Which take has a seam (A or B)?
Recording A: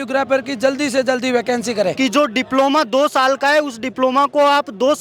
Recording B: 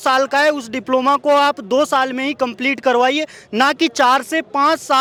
A